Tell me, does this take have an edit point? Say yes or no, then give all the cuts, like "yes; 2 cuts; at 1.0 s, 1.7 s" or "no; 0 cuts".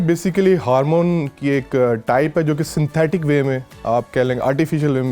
no; 0 cuts